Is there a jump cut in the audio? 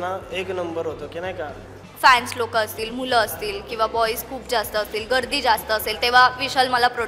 yes; 1 cut; at 1.8 s

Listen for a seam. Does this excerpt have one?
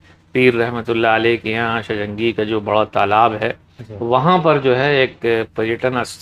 no; 0 cuts

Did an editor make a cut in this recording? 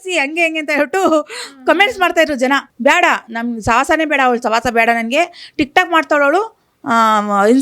yes; 1 cut; at 2.7 s

